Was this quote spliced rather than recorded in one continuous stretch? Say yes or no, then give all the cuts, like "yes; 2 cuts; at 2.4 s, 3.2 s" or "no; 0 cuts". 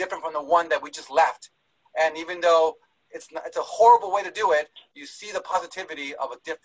no; 0 cuts